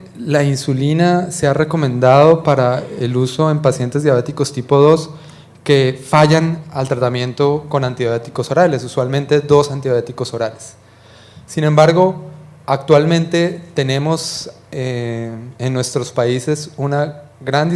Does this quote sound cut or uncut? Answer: uncut